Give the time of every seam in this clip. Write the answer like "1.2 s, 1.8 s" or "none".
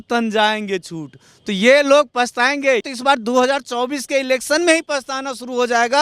2.8 s